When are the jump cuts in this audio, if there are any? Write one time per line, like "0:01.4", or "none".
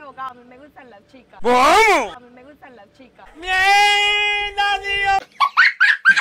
none